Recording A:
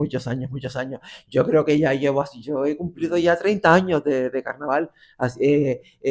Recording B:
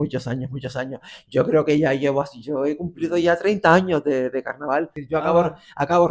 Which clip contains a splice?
B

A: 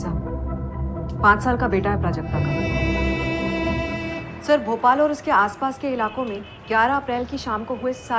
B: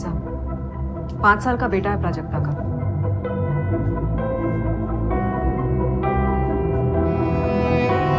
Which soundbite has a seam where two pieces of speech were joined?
A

